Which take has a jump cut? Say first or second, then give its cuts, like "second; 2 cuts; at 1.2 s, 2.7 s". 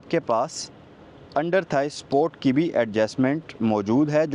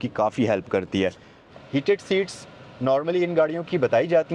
second; 1 cut; at 1.5 s